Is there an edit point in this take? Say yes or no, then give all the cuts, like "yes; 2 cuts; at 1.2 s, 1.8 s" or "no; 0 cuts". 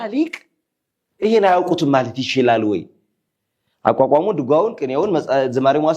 no; 0 cuts